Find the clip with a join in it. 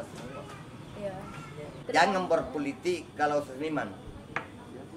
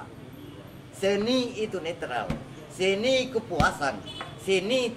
first; 1 cut; at 1.8 s

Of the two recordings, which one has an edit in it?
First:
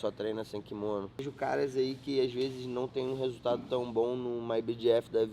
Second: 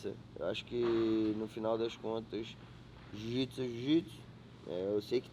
first; 1 cut; at 1.3 s

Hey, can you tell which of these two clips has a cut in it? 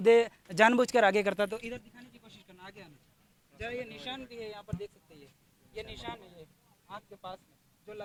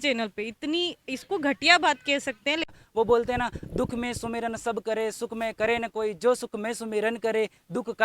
second; 1 cut; at 2.7 s

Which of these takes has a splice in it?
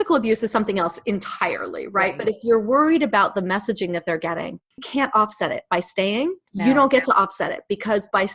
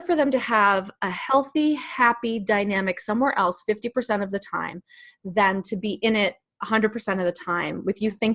first; 2 cuts; at 4.9 s, 6.5 s

